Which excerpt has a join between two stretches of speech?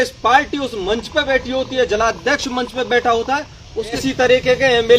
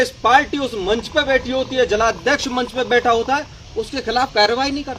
first; 1 cut; at 4.0 s

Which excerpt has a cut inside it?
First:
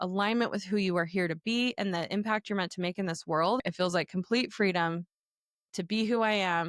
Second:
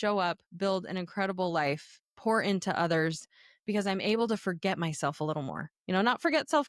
first; 1 cut; at 3.6 s

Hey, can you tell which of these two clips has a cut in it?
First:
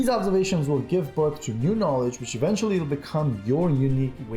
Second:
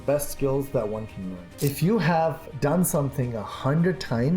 second; 2 cuts; at 1.4 s, 2.5 s

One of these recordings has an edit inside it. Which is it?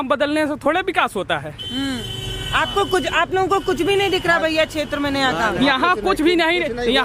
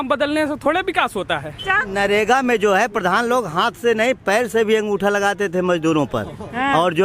second; 1 cut; at 1.8 s

